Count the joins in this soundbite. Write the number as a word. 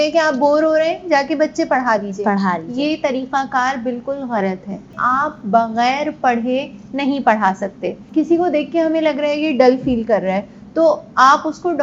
two